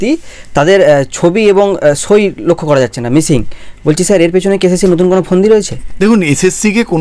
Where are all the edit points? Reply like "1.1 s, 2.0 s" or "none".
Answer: 5.8 s